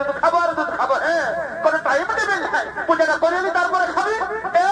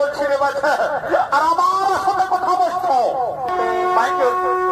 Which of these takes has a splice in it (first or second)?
second